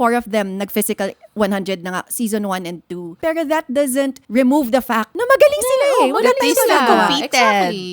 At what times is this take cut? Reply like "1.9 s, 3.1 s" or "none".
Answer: 3.1 s, 4.2 s, 5.1 s

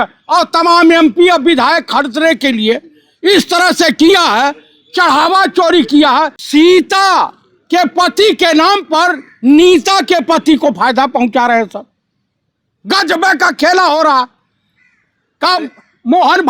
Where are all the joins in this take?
6.4 s

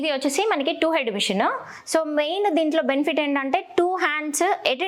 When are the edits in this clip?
none

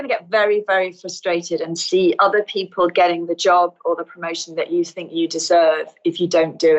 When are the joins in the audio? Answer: none

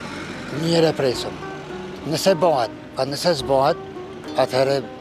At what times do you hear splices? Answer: none

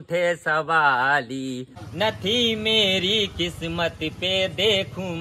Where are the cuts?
1.7 s

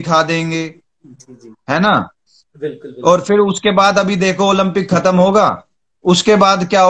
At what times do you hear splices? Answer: none

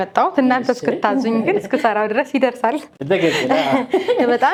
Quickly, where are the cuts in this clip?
none

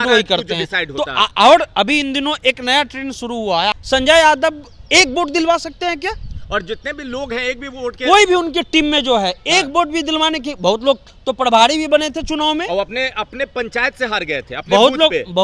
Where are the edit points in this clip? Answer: 3.7 s

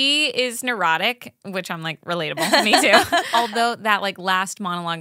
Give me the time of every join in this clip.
3.3 s

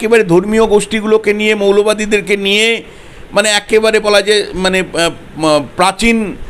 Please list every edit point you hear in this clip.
none

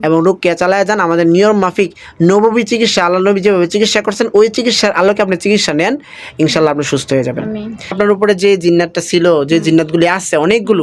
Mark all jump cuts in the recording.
7.9 s

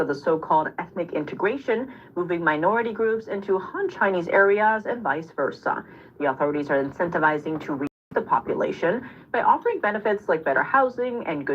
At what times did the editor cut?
8.1 s

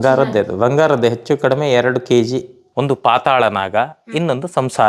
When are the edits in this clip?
2.6 s

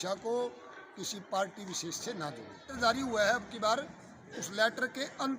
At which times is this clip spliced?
2.7 s

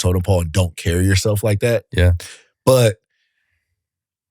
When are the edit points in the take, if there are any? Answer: none

